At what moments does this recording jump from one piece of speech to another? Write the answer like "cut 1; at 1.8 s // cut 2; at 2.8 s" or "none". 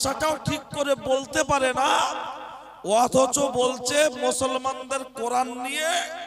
none

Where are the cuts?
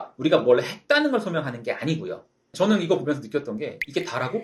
cut 1; at 2.5 s

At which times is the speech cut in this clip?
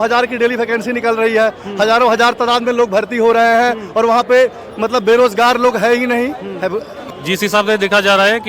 cut 1; at 7.0 s

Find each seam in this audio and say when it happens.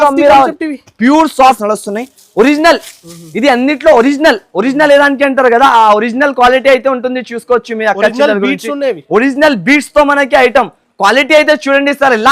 cut 1; at 1.6 s

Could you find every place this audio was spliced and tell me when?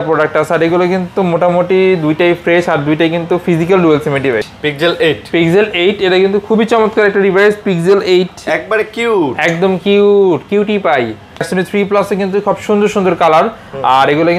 cut 1; at 4.5 s // cut 2; at 11.4 s

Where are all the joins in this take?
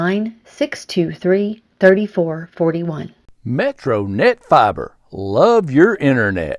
cut 1; at 3.2 s

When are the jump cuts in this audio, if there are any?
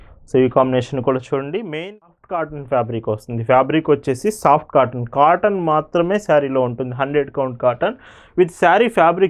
cut 1; at 1.9 s

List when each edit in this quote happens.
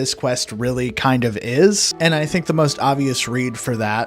cut 1; at 1.9 s

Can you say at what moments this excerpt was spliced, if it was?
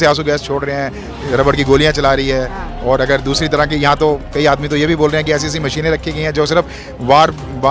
none

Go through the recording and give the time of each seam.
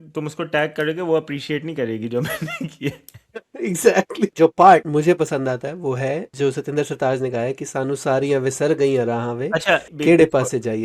cut 1; at 4.3 s // cut 2; at 4.9 s // cut 3; at 6.3 s // cut 4; at 9.9 s

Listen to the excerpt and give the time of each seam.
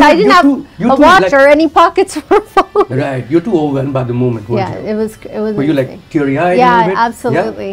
none

